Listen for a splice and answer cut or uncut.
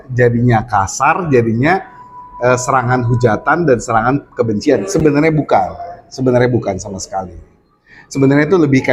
uncut